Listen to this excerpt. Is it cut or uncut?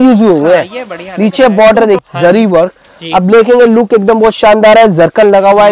cut